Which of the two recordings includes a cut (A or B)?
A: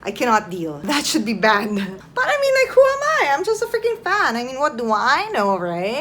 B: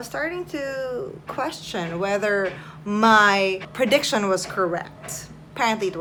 A